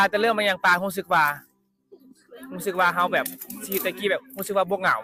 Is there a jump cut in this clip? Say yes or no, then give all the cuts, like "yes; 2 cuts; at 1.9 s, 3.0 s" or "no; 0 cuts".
no; 0 cuts